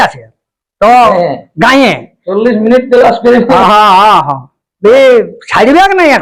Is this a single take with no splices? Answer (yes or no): yes